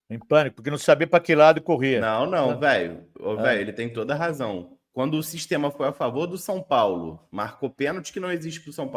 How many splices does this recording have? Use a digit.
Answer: 1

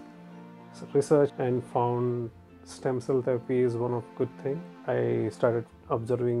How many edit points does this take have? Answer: 2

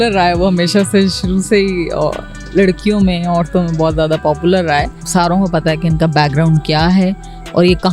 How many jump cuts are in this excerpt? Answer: 1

